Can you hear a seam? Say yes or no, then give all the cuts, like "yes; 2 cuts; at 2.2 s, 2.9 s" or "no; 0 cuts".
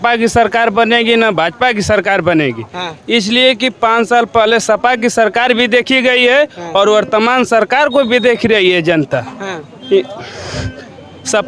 no; 0 cuts